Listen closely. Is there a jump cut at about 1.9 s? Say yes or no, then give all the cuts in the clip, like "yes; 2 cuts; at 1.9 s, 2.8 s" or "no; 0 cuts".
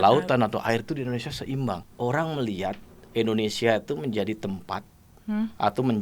yes; 1 cut; at 1.9 s